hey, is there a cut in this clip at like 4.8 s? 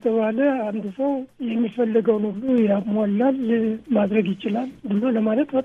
yes; 2 cuts; at 1.3 s, 4.8 s

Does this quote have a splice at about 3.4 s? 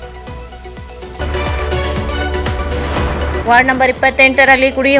yes; 1 cut; at 3.4 s

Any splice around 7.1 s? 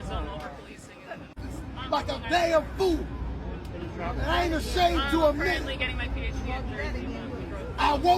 no; 0 cuts

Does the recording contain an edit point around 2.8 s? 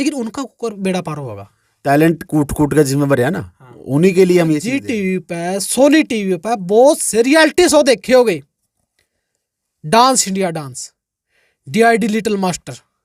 no; 1 cut; at 4.9 s

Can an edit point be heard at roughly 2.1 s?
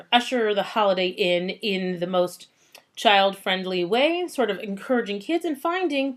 no; 1 cut; at 4.5 s

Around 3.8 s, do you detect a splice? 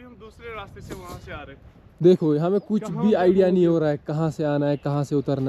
no; 0 cuts

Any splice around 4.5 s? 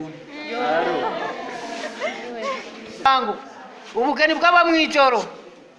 no; 1 cut; at 3.1 s

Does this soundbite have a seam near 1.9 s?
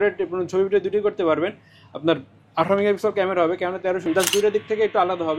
no; 1 cut; at 4.0 s

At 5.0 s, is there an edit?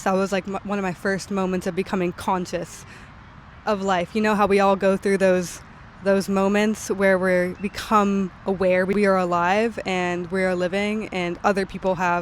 no; 1 cut; at 8.9 s

